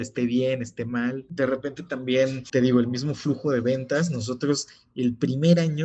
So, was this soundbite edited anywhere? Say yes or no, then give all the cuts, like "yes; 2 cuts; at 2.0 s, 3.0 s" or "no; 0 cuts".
yes; 2 cuts; at 1.2 s, 2.4 s